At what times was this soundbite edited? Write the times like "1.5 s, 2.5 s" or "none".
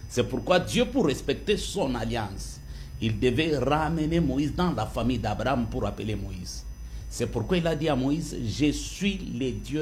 none